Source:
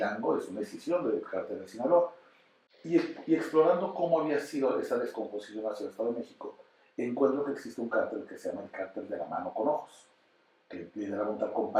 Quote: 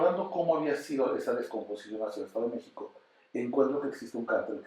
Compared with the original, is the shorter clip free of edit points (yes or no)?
yes